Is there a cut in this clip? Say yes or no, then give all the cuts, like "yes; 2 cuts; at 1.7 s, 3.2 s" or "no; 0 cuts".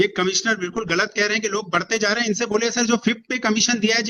no; 0 cuts